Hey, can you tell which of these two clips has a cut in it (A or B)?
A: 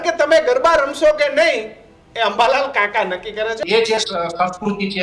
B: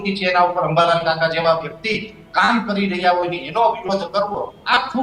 A